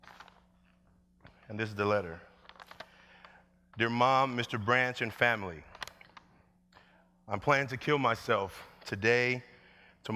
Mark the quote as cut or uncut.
uncut